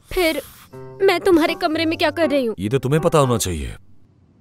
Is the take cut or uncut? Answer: uncut